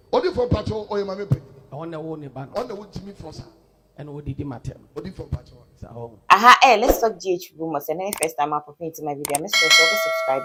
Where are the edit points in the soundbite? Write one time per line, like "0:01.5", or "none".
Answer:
none